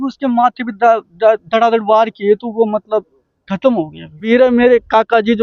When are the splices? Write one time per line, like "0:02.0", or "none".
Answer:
0:04.3

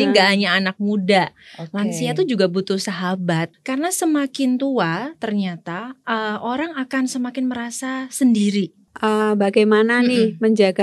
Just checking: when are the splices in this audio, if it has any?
0:03.5
0:08.9

